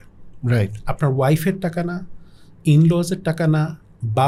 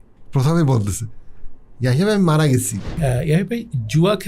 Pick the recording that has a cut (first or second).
second